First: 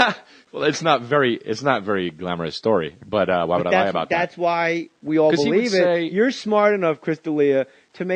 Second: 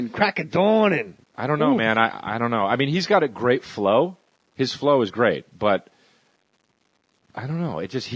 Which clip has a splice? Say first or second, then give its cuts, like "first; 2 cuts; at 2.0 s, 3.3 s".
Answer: second; 1 cut; at 5.4 s